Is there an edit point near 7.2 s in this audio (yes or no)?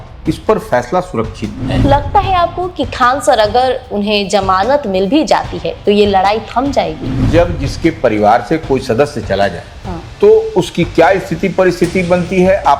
yes